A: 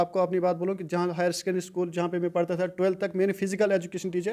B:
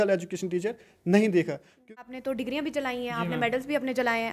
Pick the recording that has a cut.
B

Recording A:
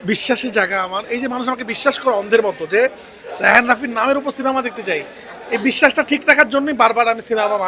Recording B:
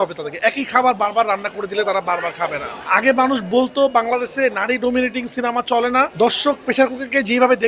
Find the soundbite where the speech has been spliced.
B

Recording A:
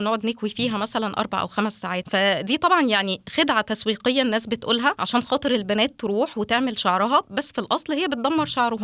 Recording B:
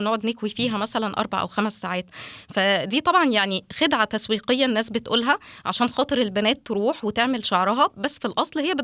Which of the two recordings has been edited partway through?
A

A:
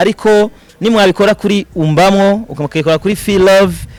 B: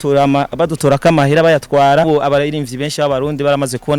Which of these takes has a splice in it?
B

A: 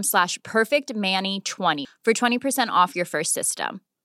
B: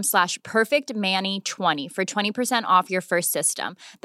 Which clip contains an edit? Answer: A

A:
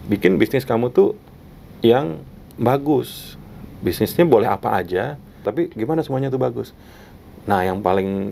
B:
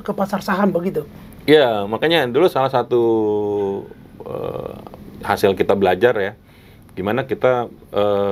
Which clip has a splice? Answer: A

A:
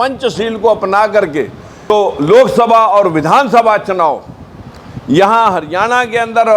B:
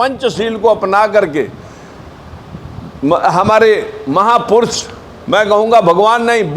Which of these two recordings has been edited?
A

